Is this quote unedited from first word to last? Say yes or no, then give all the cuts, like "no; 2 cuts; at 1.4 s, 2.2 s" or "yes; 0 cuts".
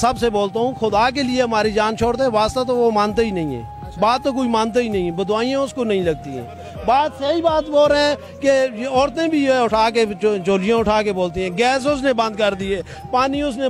yes; 0 cuts